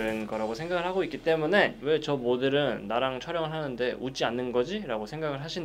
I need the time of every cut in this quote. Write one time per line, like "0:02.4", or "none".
none

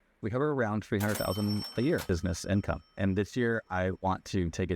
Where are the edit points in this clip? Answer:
0:02.1

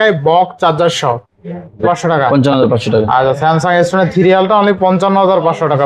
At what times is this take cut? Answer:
0:01.8

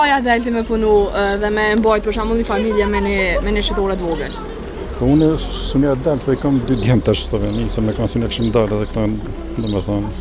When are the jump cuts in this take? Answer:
none

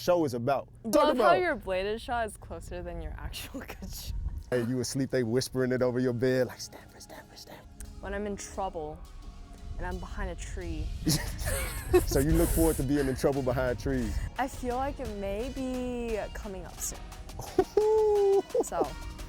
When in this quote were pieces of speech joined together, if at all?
0:00.9
0:04.5
0:07.4
0:11.0
0:14.2

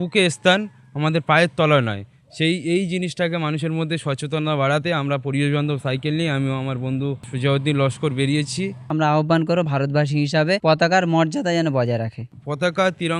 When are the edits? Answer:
0:07.3
0:08.8
0:10.6
0:12.2

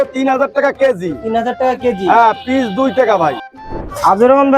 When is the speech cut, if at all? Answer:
0:03.4

